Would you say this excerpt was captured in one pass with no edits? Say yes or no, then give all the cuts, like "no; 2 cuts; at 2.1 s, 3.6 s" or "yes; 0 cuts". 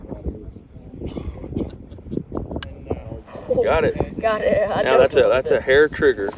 yes; 0 cuts